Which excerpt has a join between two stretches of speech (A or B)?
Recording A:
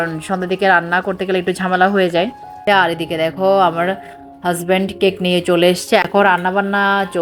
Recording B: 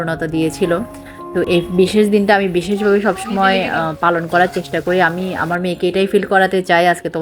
A